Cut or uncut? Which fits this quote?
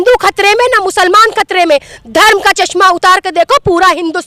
uncut